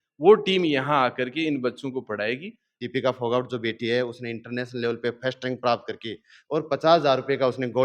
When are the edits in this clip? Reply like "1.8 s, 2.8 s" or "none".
2.6 s